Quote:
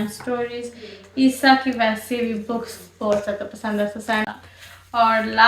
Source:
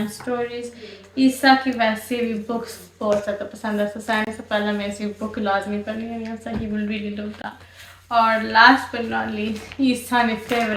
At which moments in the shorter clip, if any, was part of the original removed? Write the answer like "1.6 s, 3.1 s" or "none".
4.4 s